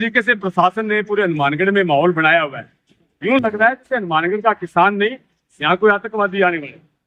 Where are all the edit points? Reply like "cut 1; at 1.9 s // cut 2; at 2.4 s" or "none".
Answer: none